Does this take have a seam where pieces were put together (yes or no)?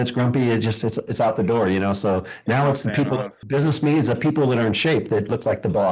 yes